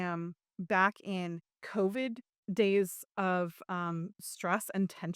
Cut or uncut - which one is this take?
cut